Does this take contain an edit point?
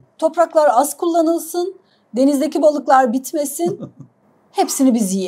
no; 0 cuts

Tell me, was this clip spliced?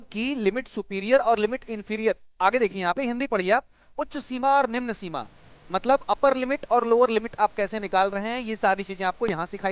no; 0 cuts

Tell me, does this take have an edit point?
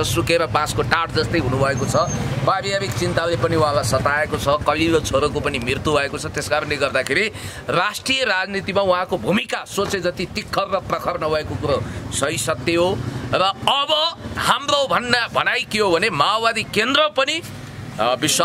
no; 0 cuts

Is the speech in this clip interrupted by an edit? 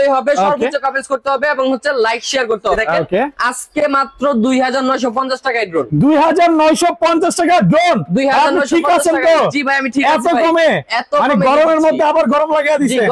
yes; 1 cut; at 2.8 s

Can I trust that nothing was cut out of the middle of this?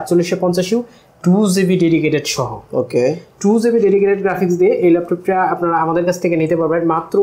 yes; 0 cuts

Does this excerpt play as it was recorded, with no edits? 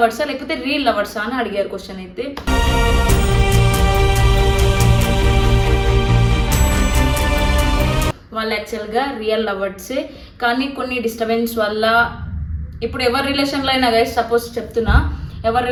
yes; 0 cuts

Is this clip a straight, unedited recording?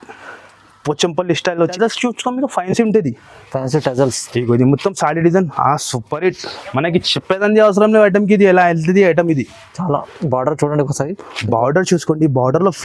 no; 1 cut; at 1.7 s

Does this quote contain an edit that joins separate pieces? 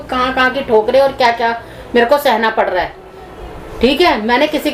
no; 0 cuts

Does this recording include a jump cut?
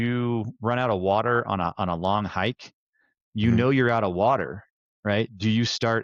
no; 0 cuts

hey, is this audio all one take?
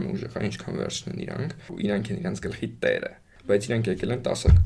no; 2 cuts; at 1.7 s, 3.3 s

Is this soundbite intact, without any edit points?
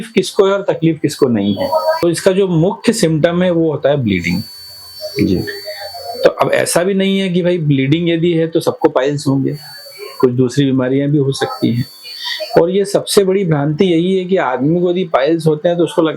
no; 1 cut; at 2.0 s

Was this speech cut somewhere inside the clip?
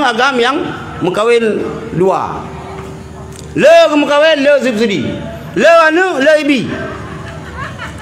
no; 0 cuts

